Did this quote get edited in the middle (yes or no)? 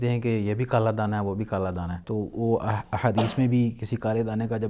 yes